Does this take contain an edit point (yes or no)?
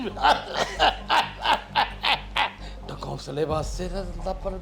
yes